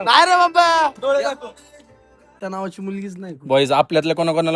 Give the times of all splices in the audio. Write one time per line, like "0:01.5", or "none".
0:02.3